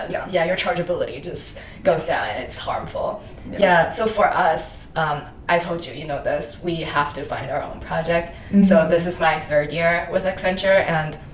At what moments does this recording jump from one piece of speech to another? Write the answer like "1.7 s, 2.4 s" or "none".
none